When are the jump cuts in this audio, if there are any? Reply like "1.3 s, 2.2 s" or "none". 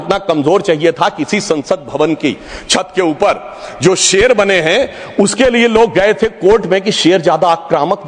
none